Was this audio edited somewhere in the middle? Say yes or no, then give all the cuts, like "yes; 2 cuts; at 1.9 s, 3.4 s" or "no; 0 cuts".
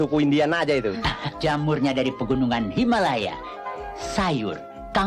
yes; 2 cuts; at 1.1 s, 3.8 s